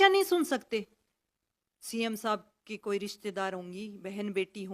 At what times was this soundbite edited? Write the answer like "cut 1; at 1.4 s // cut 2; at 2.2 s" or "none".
cut 1; at 1.2 s